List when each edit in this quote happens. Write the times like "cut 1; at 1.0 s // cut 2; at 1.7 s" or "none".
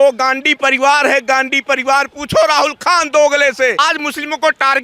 cut 1; at 3.8 s